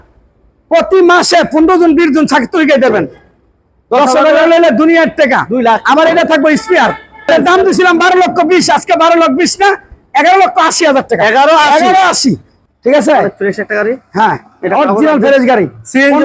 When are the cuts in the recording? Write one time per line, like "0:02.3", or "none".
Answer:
0:07.3
0:12.5